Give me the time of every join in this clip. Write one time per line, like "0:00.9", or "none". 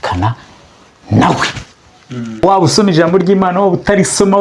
0:02.4

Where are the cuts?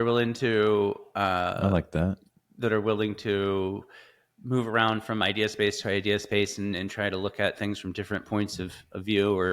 none

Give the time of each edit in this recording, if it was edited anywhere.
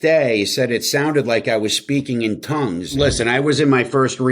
0:02.9

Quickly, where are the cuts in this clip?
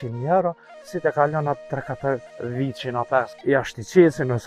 0:02.3
0:03.3

